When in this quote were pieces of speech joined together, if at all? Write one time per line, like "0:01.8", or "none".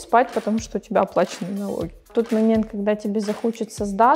0:02.1